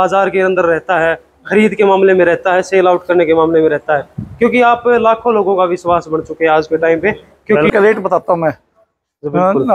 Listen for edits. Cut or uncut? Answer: cut